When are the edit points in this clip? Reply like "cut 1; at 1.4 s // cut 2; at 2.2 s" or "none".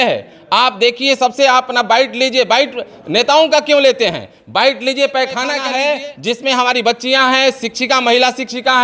cut 1; at 5.6 s

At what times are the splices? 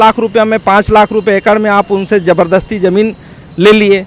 none

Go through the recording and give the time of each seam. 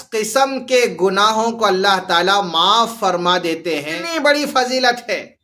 cut 1; at 3.7 s

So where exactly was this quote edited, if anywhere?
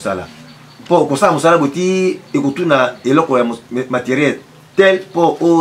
none

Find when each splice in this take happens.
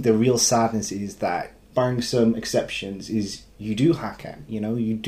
cut 1; at 1.6 s

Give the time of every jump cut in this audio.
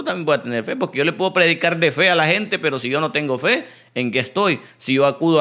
none

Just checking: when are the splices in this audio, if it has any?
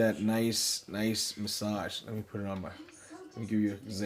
none

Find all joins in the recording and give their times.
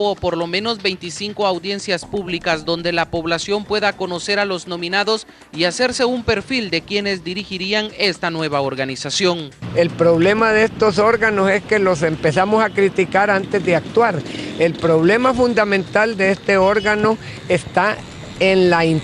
cut 1; at 5.7 s

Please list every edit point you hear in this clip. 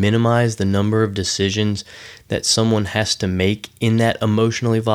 none

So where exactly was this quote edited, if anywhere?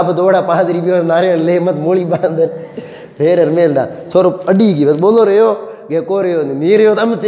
none

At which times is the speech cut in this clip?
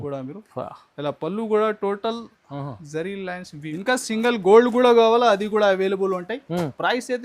cut 1; at 3.7 s

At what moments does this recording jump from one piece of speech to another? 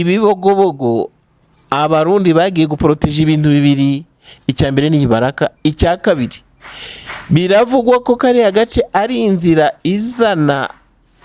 none

